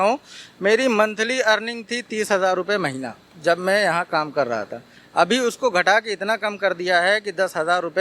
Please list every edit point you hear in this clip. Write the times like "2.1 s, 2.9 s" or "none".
none